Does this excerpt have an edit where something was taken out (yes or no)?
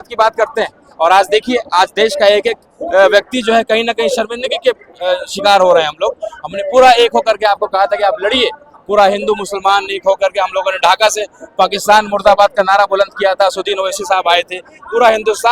no